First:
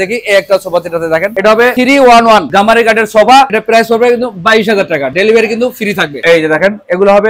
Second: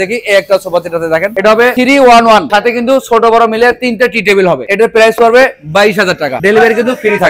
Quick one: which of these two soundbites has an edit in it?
first; 2 cuts; at 2.5 s, 6.1 s

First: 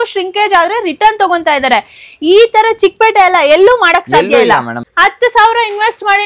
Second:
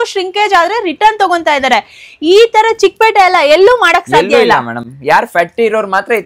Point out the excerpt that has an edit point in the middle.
first; 1 cut; at 4.8 s

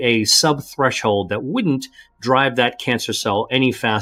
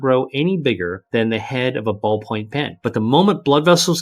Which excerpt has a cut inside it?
second; 2 cuts; at 1.0 s, 2.7 s

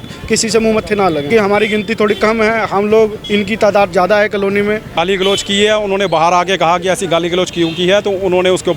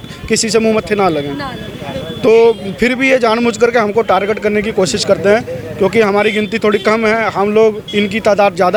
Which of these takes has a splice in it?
first; 2 cuts; at 1.3 s, 4.9 s

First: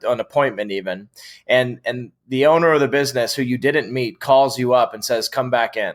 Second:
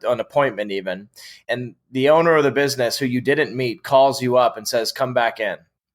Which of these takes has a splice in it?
second; 1 cut; at 1.4 s

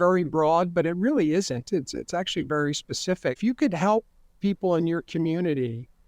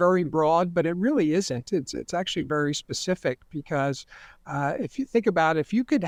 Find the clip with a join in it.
first; 1 cut; at 3.4 s

